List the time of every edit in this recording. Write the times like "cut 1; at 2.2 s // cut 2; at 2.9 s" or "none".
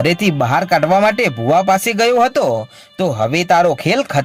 none

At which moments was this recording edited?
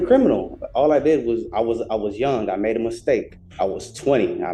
cut 1; at 3.4 s

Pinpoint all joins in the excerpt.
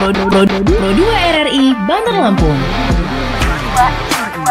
none

